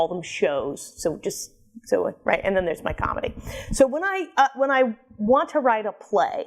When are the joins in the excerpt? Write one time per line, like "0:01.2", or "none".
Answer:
0:04.3